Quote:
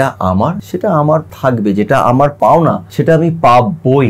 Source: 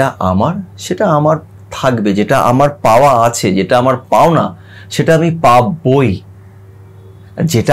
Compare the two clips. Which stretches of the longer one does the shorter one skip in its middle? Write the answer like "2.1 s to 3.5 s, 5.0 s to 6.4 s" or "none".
1.0 s to 1.4 s, 2.8 s to 4.4 s